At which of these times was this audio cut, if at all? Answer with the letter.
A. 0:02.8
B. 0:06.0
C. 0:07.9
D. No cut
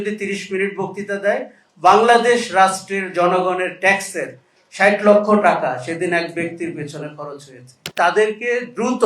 C